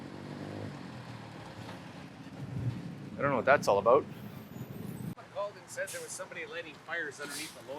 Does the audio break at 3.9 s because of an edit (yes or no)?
no